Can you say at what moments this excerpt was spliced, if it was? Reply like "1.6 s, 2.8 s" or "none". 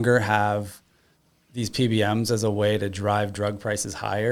none